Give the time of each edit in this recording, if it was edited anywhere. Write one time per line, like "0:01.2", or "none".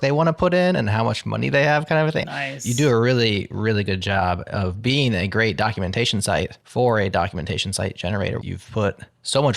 0:02.2
0:06.6
0:08.5

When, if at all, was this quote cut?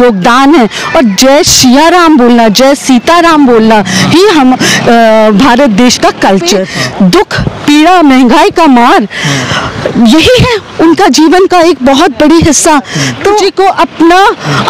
0:06.7
0:13.4

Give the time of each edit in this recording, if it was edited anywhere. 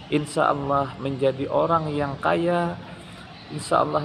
none

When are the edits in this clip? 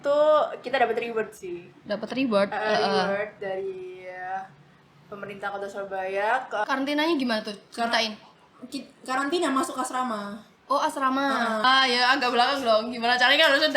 0:06.6
0:11.6

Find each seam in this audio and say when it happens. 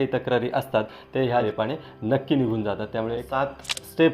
0:01.4
0:03.3

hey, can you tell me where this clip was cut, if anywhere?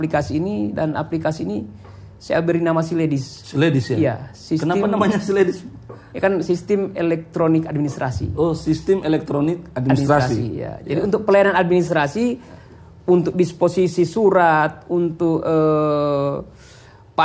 none

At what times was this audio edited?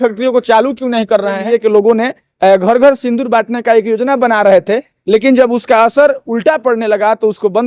0:01.4

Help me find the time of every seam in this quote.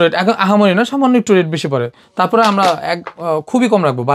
none

